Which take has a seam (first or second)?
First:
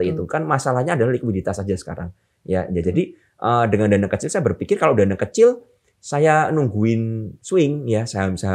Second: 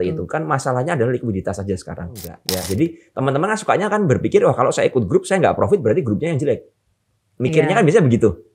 second